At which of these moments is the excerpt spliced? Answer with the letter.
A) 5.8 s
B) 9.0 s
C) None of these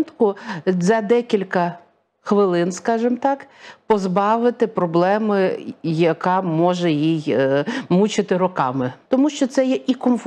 B